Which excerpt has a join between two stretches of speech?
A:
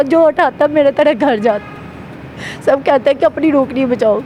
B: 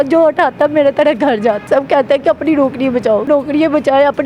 B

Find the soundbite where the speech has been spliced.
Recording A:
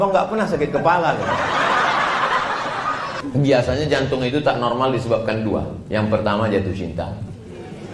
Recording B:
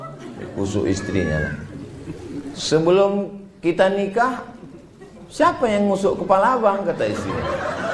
A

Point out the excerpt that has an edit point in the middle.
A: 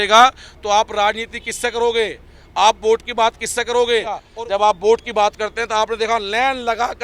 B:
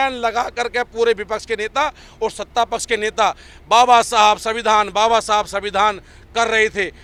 A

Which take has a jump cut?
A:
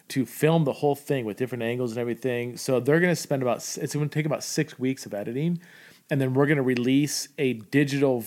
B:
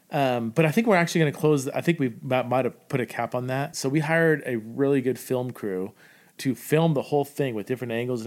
B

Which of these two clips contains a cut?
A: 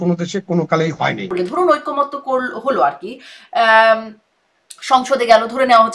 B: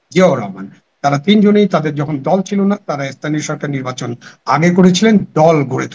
A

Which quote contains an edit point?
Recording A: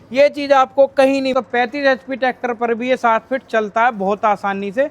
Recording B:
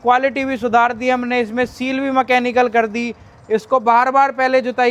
A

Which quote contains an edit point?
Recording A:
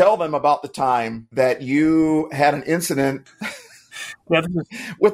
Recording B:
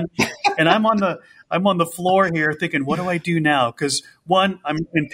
A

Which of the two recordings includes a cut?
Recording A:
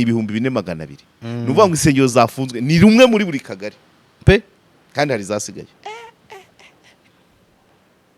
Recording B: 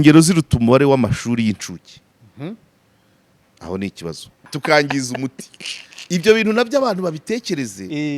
B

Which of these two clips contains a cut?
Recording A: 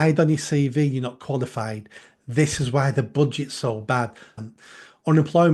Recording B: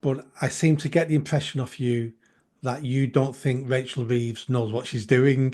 A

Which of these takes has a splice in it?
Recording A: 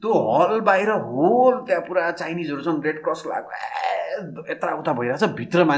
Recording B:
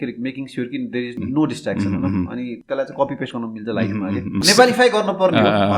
B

